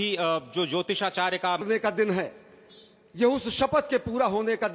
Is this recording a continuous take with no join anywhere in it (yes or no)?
no